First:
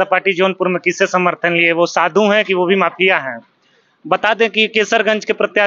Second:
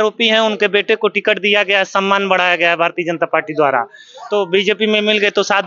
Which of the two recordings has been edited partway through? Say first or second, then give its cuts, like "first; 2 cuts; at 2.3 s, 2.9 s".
second; 1 cut; at 4.2 s